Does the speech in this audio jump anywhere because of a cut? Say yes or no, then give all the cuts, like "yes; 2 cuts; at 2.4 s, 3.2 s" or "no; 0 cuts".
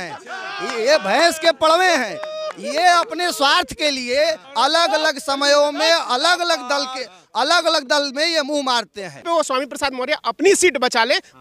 yes; 2 cuts; at 4.4 s, 9.2 s